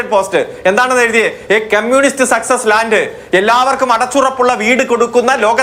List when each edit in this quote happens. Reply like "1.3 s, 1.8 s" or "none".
none